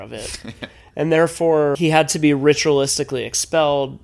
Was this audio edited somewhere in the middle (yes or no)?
yes